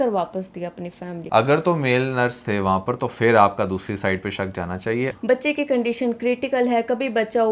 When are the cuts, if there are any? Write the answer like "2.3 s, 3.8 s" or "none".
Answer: 1.2 s, 5.1 s